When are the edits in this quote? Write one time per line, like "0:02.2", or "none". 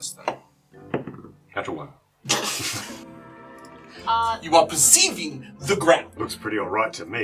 0:06.1